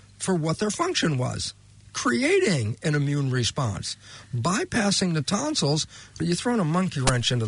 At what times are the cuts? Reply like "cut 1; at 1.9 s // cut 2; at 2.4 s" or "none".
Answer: cut 1; at 6.2 s